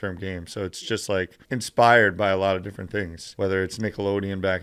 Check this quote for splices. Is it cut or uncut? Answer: cut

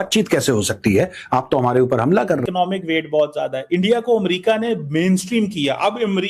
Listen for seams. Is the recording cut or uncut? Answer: cut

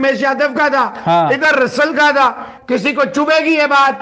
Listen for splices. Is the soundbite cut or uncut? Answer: cut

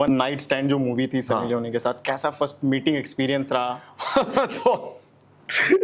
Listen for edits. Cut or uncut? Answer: uncut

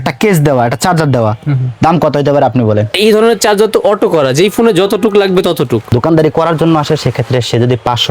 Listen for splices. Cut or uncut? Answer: cut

